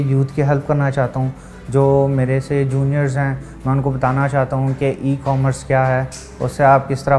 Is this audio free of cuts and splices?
yes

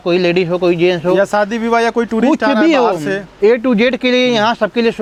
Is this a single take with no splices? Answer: yes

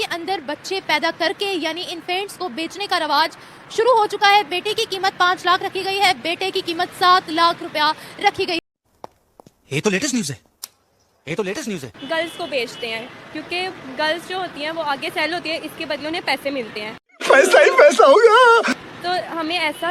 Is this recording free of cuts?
no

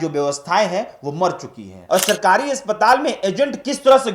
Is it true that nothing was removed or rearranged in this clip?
no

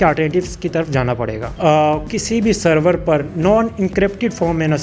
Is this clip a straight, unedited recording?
no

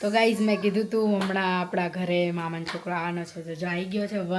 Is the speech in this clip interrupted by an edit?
no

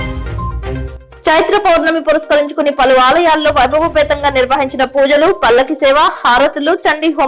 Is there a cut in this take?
no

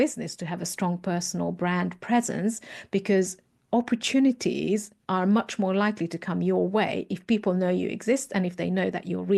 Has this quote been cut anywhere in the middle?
no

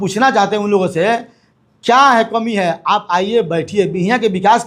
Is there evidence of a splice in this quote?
no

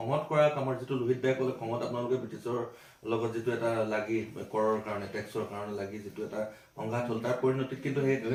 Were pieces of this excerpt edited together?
no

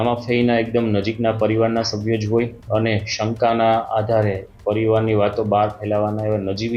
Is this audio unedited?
yes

